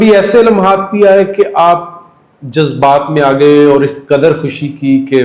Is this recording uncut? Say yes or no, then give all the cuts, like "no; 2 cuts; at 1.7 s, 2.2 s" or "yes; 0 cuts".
yes; 0 cuts